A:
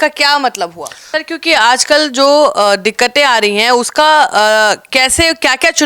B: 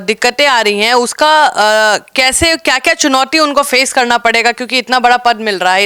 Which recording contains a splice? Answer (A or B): A